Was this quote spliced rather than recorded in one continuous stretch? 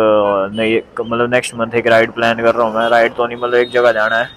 no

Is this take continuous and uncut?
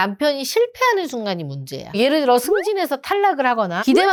yes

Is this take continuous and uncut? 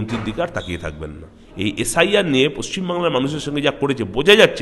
no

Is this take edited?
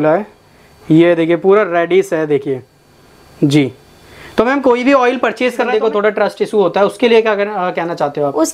yes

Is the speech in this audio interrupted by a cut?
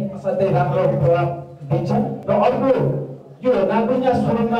no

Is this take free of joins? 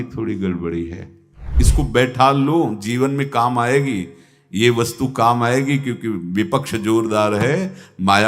no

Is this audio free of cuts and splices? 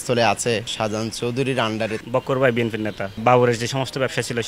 no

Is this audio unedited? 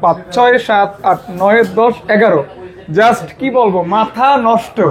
yes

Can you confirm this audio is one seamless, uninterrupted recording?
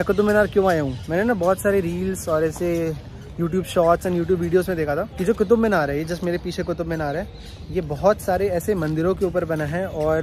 yes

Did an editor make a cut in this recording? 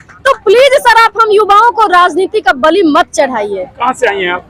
no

